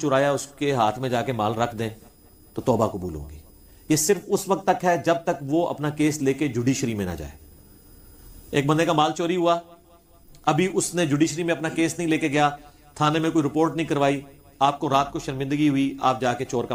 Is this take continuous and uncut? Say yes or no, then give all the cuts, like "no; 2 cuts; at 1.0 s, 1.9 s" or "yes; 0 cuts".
yes; 0 cuts